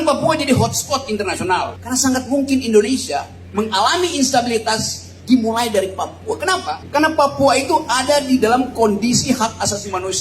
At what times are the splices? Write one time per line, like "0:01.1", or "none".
0:01.8
0:03.4
0:06.8